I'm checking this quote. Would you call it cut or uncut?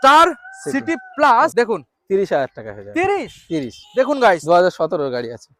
cut